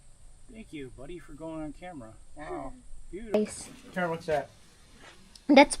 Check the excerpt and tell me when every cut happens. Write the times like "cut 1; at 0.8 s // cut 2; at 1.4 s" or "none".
cut 1; at 3.3 s